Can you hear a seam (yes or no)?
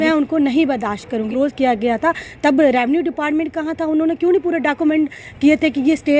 yes